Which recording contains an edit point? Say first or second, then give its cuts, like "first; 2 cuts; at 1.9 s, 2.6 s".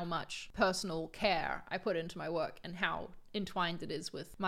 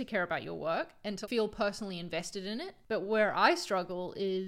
second; 2 cuts; at 1.2 s, 2.7 s